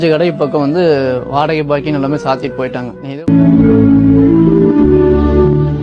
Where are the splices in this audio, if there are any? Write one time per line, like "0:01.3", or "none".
0:03.2